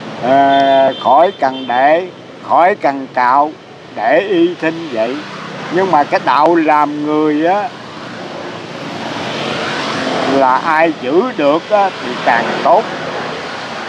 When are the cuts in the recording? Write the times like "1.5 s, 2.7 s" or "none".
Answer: none